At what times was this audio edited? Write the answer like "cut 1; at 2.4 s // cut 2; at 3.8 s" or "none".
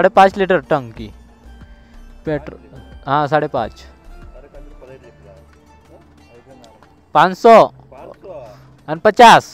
none